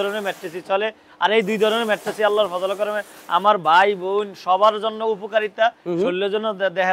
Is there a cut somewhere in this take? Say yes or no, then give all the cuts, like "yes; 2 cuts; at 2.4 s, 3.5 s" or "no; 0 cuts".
no; 0 cuts